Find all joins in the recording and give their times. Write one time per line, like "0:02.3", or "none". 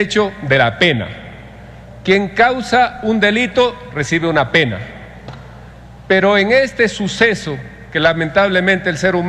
0:01.2